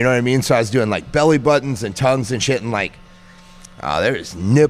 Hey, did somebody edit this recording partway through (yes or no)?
no